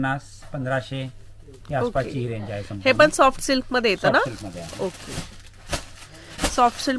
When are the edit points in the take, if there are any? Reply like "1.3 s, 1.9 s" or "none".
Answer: none